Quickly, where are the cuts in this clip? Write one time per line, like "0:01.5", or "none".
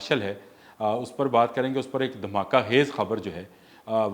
none